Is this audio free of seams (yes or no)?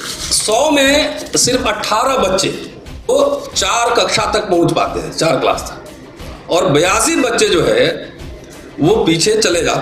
no